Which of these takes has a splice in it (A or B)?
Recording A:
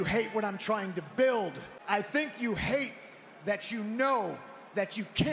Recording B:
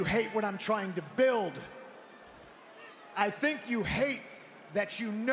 A